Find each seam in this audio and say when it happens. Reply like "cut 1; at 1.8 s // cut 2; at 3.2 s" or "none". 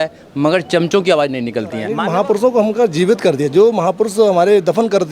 cut 1; at 2.0 s

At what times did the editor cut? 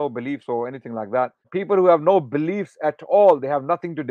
cut 1; at 1.5 s

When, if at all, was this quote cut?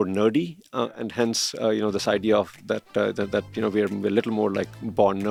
none

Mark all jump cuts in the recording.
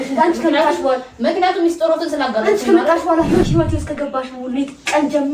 cut 1; at 3.4 s

